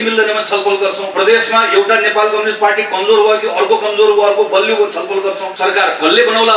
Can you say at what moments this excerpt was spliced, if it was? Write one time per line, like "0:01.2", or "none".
0:01.0
0:05.5